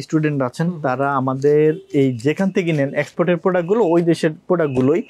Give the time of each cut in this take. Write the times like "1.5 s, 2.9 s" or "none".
none